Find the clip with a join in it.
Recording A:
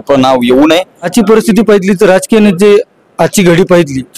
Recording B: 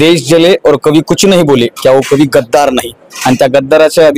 A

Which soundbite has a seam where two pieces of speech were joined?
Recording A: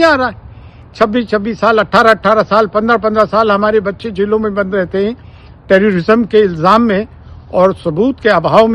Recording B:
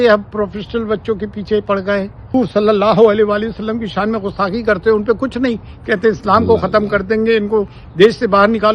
B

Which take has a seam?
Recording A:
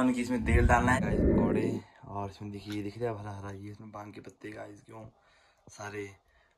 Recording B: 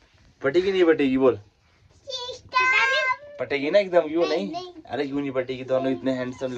A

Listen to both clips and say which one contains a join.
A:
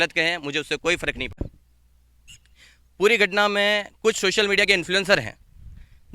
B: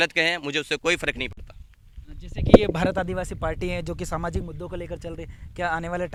A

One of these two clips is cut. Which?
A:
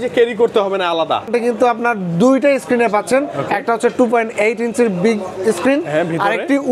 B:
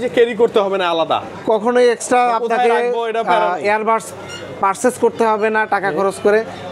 A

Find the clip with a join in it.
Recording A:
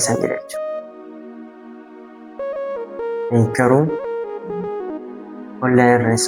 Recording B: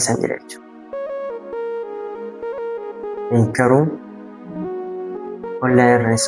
B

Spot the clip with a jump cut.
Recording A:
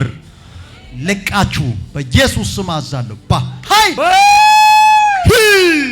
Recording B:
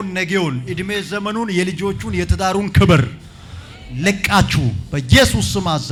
A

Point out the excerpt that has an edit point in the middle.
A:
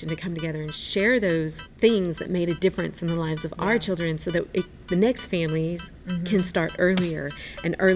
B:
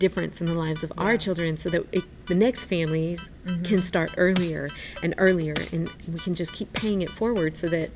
A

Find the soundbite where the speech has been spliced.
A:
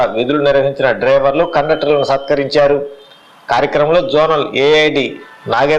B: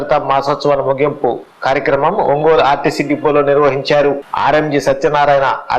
B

